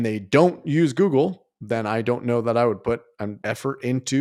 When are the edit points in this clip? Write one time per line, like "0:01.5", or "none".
0:03.3